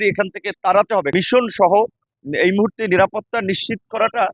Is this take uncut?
no; 1 cut; at 1.1 s

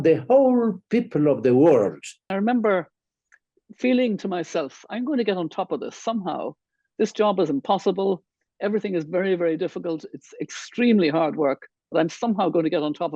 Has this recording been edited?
yes; 1 cut; at 2.3 s

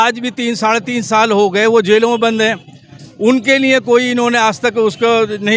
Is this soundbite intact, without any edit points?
yes; 0 cuts

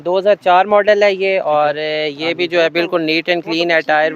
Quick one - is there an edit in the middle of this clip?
no; 0 cuts

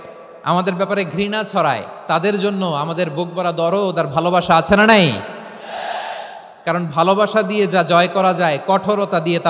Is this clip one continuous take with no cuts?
yes; 0 cuts

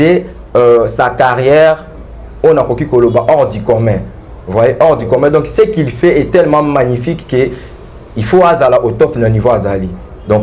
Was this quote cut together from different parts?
no; 0 cuts

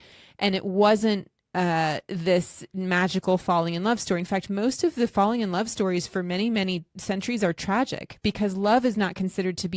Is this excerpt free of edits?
yes; 0 cuts

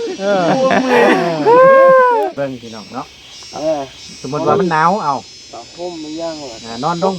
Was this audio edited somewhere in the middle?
yes; 1 cut; at 2.3 s

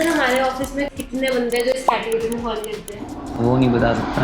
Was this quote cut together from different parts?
yes; 1 cut; at 0.9 s

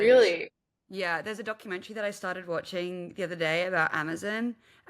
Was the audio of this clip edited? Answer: no; 0 cuts

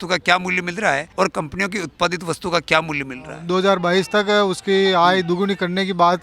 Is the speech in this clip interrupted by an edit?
yes; 2 cuts; at 1.1 s, 3.3 s

